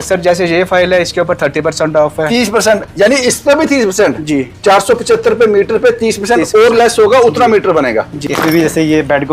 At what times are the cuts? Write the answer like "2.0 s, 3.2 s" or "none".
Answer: 8.2 s